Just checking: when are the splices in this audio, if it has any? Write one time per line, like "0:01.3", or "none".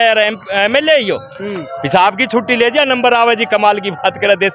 none